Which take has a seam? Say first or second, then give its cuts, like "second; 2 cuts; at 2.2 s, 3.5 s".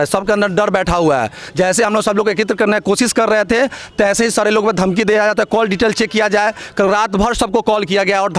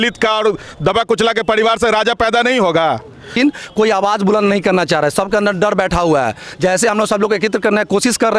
second; 1 cut; at 3.3 s